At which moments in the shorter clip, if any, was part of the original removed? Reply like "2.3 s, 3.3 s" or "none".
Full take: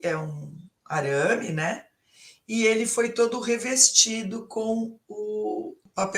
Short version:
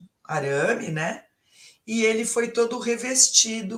none